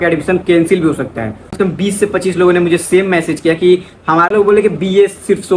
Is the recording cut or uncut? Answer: cut